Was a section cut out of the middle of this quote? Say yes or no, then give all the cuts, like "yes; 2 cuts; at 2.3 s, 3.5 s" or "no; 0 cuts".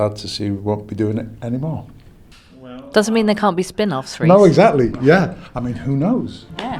no; 0 cuts